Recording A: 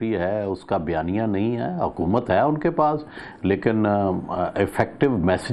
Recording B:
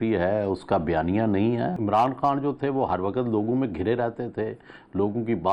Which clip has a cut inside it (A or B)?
B